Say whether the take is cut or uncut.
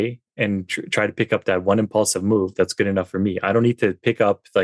uncut